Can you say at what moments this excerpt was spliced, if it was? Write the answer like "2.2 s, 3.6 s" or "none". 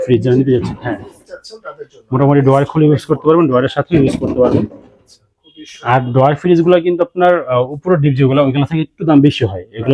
none